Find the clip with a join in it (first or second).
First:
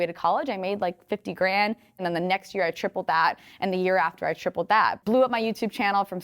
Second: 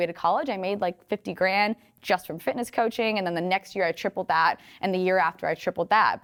first